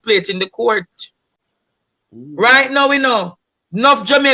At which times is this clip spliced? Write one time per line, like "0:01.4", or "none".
0:01.2